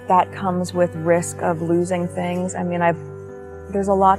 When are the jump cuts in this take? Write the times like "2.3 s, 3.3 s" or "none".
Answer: none